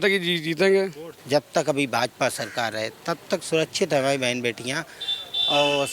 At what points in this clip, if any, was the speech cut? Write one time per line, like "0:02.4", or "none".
0:01.1